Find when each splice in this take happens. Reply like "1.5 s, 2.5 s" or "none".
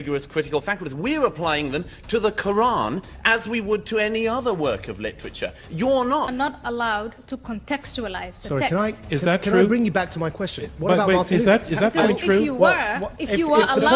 6.3 s